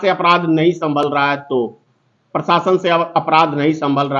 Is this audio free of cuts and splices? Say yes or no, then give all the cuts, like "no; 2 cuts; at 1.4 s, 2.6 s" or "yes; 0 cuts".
yes; 0 cuts